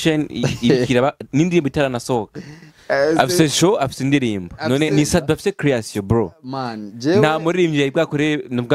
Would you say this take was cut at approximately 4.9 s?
yes; 1 cut; at 4.9 s

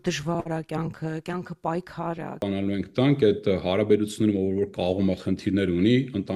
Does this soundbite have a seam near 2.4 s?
yes; 1 cut; at 2.4 s

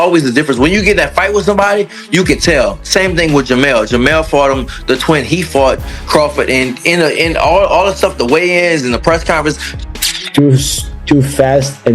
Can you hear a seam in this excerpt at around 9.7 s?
yes; 1 cut; at 9.7 s

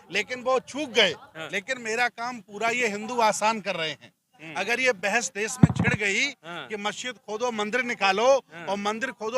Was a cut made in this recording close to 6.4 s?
no; 1 cut; at 1.3 s

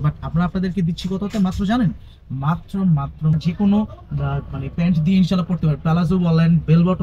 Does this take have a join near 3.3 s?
yes; 1 cut; at 3.3 s

